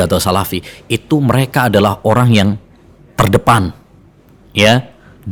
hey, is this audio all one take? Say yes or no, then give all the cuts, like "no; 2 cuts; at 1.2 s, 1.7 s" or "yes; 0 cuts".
yes; 0 cuts